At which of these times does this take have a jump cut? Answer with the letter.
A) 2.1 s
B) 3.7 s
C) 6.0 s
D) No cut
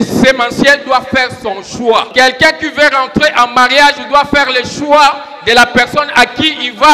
A